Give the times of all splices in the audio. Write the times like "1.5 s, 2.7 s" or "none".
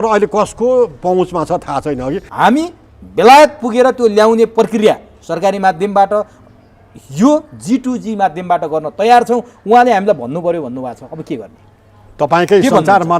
2.3 s